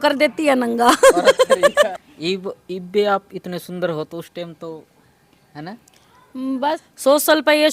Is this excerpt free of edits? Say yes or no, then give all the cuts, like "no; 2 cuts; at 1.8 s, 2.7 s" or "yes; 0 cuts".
no; 2 cuts; at 1.9 s, 6.8 s